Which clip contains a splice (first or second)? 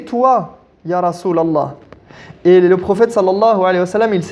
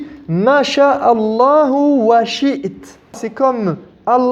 second